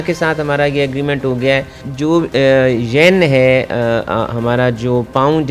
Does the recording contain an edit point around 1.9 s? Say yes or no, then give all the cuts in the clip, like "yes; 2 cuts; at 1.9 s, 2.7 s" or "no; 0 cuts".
yes; 1 cut; at 1.9 s